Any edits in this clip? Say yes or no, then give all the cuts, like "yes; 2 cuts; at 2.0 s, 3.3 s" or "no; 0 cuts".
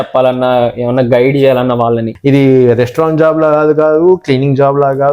yes; 1 cut; at 2.2 s